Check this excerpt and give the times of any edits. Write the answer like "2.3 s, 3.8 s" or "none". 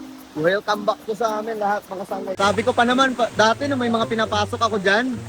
2.3 s